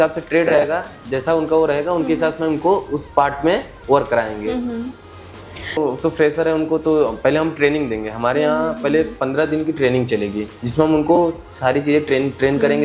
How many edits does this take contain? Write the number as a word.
one